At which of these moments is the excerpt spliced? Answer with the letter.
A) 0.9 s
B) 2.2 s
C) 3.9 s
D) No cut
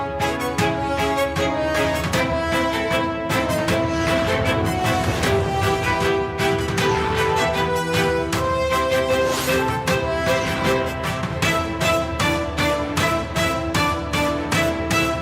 D